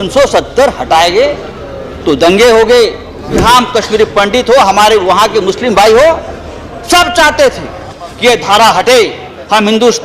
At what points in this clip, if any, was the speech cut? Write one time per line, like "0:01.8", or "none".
0:03.3